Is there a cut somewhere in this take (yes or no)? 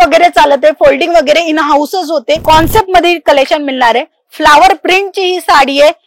yes